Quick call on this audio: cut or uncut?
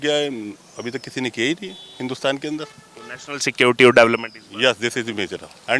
uncut